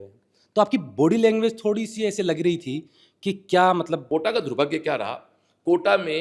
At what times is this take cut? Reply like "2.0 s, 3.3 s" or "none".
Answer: 4.0 s